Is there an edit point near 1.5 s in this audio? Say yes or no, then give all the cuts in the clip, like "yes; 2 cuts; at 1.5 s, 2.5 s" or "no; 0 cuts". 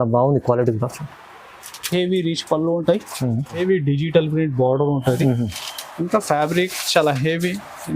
no; 1 cut; at 3.6 s